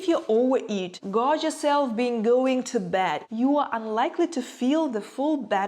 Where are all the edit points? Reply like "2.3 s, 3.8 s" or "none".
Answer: 0.9 s, 3.2 s